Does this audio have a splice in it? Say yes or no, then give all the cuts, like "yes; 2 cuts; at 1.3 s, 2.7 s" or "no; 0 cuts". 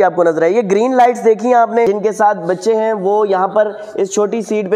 yes; 1 cut; at 1.9 s